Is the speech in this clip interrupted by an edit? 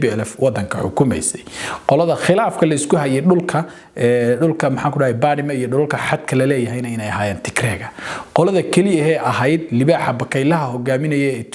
no; 0 cuts

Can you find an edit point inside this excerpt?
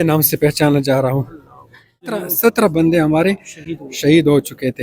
yes; 1 cut; at 2.2 s

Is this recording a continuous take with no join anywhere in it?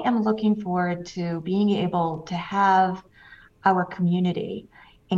yes; 0 cuts

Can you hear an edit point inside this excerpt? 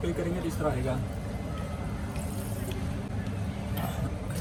no; 0 cuts

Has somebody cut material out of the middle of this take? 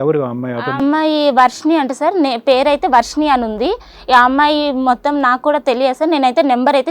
no; 0 cuts

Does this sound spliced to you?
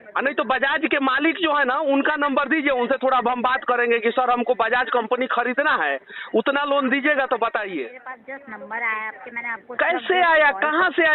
yes; 1 cut; at 8.1 s

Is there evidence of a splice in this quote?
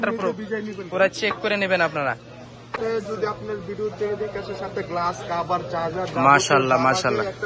yes; 1 cut; at 2.8 s

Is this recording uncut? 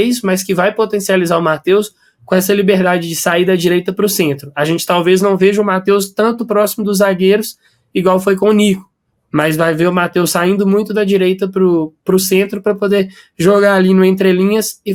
yes; 0 cuts

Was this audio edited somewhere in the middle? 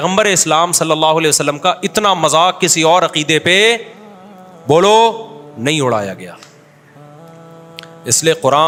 no; 0 cuts

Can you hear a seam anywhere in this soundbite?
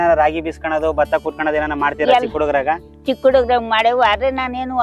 no; 0 cuts

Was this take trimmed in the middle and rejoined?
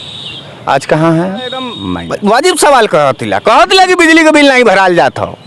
yes; 1 cut; at 1.8 s

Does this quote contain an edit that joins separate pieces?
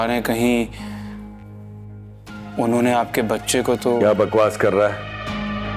no; 0 cuts

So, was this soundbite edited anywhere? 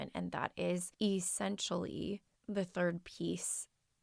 yes; 2 cuts; at 0.9 s, 2.3 s

